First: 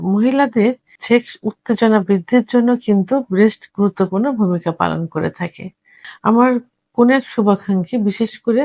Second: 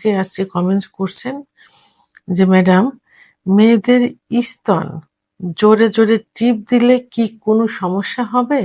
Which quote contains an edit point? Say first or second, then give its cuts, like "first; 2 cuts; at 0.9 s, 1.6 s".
first; 2 cuts; at 0.9 s, 6.0 s